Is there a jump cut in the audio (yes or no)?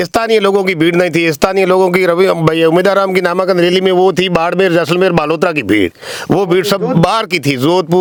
no